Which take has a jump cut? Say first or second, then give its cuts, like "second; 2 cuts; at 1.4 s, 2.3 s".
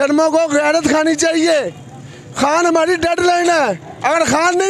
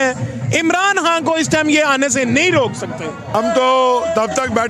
second; 1 cut; at 3.3 s